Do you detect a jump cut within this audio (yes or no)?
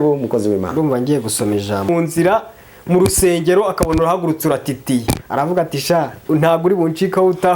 yes